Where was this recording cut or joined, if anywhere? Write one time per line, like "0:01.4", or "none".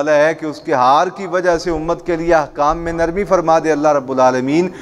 none